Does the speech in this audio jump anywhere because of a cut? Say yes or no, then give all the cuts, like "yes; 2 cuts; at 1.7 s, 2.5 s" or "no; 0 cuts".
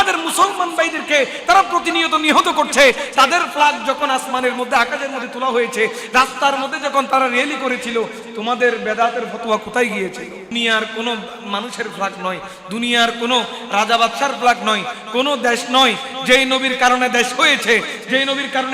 yes; 1 cut; at 10.5 s